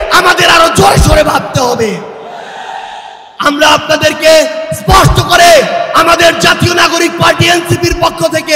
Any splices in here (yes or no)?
no